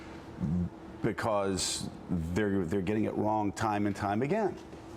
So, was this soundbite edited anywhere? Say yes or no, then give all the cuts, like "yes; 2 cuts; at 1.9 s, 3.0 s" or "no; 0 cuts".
yes; 1 cut; at 3.8 s